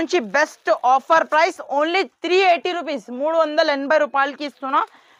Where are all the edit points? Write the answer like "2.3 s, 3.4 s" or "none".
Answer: none